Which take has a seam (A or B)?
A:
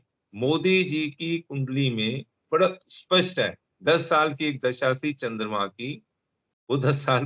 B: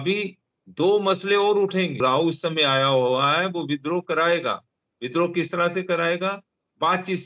B